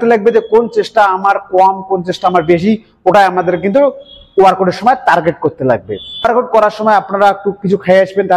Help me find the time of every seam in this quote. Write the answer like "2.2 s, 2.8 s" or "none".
6.3 s